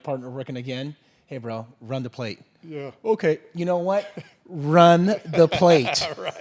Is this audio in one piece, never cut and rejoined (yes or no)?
yes